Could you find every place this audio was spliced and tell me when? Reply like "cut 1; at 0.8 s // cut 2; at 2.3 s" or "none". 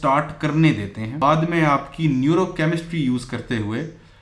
cut 1; at 1.2 s